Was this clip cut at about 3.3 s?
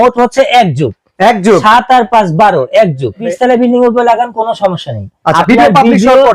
yes; 2 cuts; at 3.3 s, 5.3 s

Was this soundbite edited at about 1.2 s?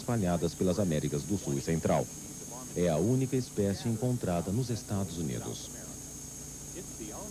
yes; 1 cut; at 1.2 s

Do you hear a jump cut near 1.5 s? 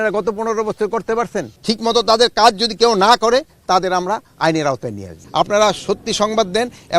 yes; 2 cuts; at 1.5 s, 5.2 s

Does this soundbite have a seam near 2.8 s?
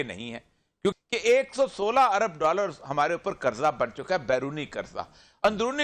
no; 1 cut; at 0.9 s

